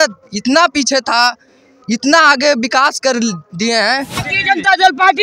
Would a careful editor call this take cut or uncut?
cut